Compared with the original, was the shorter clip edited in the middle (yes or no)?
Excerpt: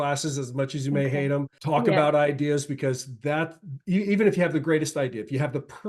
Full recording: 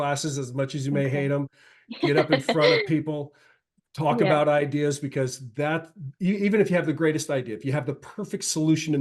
yes